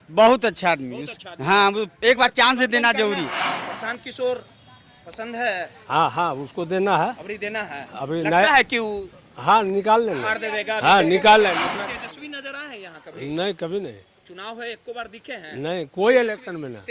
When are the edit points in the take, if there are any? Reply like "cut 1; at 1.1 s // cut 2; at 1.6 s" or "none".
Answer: cut 1; at 3.4 s // cut 2; at 11.8 s